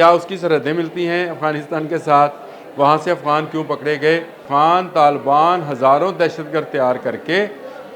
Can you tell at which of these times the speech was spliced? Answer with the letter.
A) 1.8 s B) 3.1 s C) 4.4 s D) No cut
C